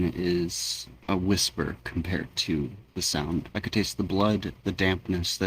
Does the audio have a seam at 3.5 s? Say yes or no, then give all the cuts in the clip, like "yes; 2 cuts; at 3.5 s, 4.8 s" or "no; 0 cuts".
yes; 1 cut; at 3.5 s